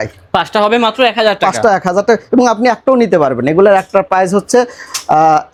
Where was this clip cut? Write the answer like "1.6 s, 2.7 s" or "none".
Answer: none